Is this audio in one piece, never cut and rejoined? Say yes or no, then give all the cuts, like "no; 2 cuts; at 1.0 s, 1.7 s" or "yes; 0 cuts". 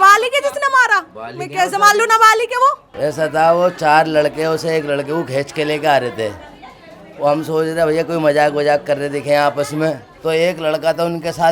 no; 2 cuts; at 2.9 s, 10.1 s